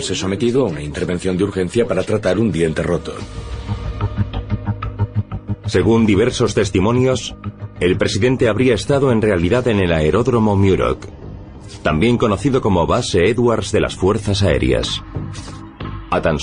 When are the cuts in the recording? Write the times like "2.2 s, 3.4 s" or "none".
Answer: 6.2 s